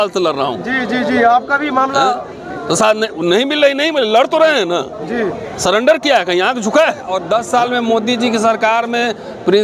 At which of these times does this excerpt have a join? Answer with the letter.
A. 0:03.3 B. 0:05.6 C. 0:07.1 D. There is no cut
C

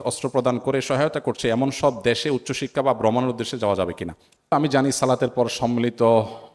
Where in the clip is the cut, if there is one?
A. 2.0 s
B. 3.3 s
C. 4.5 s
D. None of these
C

